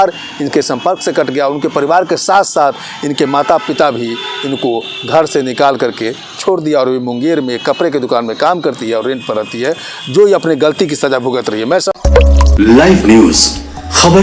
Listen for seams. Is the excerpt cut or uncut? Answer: cut